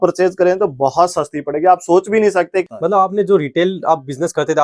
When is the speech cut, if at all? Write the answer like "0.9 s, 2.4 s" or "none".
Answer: 2.7 s